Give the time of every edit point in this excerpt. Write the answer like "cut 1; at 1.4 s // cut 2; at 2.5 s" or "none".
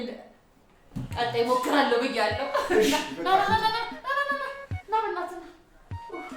cut 1; at 5.4 s